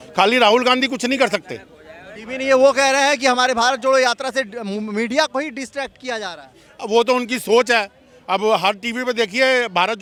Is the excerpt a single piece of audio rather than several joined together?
yes; 0 cuts

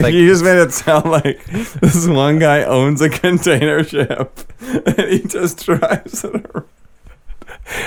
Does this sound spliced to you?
no; 0 cuts

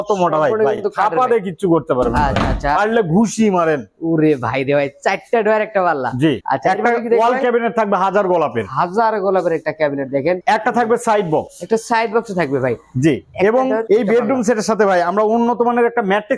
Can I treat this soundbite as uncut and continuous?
yes; 0 cuts

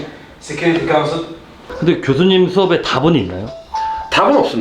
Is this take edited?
yes; 1 cut; at 1.5 s

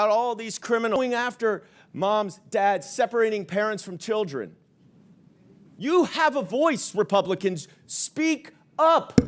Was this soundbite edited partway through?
yes; 1 cut; at 1.0 s

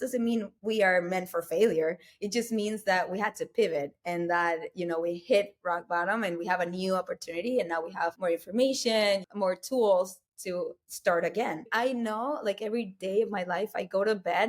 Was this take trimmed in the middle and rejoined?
yes; 4 cuts; at 8.2 s, 9.3 s, 10.9 s, 11.7 s

